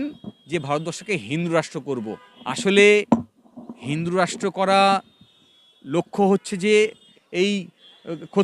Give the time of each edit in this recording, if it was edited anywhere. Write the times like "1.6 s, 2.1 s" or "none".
2.3 s, 7.1 s